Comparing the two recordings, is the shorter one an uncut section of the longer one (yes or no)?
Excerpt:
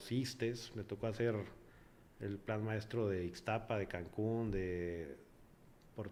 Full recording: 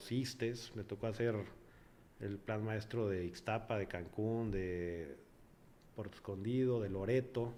yes